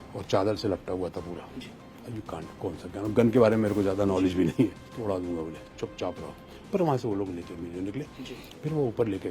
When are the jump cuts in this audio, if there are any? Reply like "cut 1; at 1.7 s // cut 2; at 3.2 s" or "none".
cut 1; at 4.9 s // cut 2; at 8.2 s